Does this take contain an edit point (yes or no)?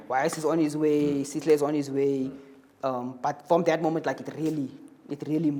no